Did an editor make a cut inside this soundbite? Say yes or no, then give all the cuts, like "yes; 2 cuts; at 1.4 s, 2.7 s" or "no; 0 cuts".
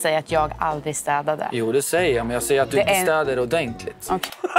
no; 0 cuts